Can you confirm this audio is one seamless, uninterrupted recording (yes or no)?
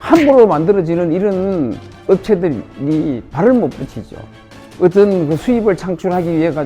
yes